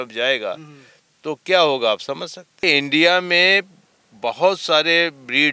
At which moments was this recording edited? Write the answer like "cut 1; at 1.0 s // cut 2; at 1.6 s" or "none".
cut 1; at 2.6 s